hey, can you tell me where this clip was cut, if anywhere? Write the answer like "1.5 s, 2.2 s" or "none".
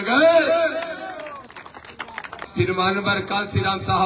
2.4 s